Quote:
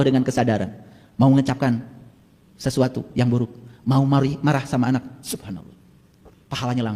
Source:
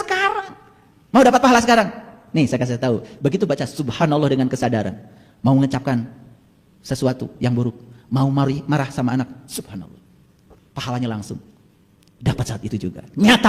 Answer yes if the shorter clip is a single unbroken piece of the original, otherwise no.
yes